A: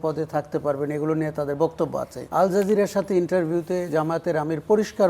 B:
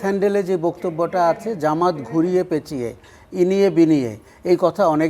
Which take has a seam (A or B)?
A